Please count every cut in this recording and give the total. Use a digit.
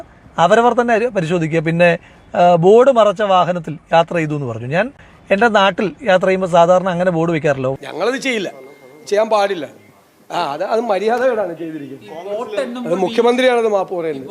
1